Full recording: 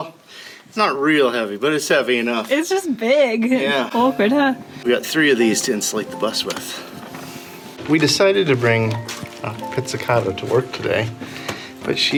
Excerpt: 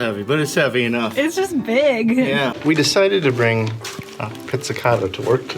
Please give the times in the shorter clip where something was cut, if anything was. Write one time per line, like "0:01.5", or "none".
0:02.5